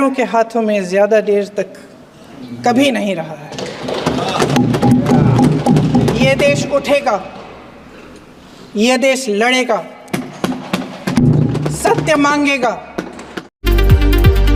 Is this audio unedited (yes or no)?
yes